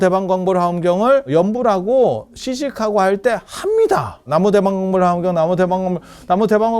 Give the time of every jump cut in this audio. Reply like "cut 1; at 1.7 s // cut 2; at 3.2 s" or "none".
cut 1; at 1.3 s // cut 2; at 4.3 s